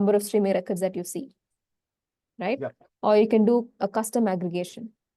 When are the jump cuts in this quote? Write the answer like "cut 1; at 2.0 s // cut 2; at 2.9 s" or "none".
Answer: none